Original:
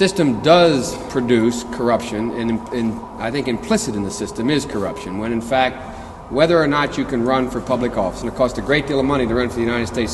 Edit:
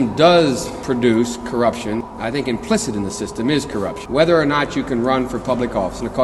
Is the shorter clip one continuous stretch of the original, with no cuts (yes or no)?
no